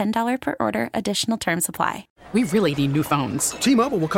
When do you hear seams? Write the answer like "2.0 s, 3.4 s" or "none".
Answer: 2.1 s